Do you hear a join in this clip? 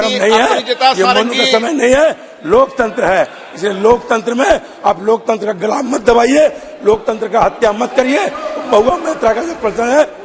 no; 0 cuts

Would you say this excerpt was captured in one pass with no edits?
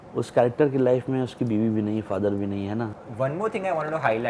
no; 1 cut; at 3.0 s

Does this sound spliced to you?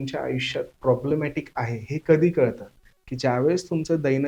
no; 0 cuts

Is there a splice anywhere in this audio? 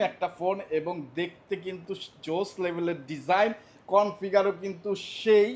no; 0 cuts

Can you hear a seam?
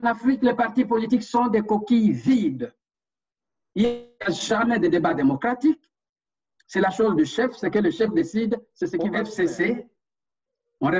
yes; 1 cut; at 9.0 s

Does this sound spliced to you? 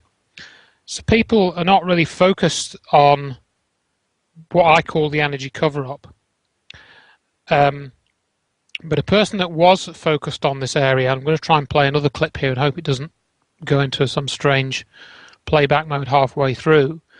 yes; 1 cut; at 6.1 s

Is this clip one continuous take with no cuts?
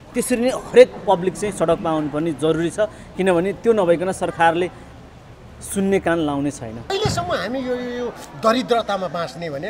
no; 1 cut; at 6.9 s

